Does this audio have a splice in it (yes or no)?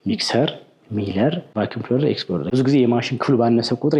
yes